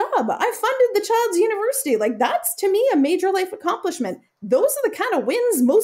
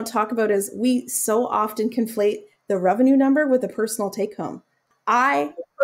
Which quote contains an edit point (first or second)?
second